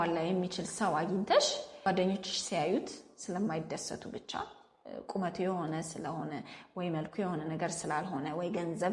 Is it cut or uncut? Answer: cut